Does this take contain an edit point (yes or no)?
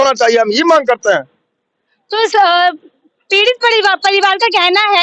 no